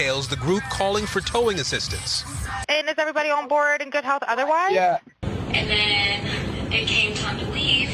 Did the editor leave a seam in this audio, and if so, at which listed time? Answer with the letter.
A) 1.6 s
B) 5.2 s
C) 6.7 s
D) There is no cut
B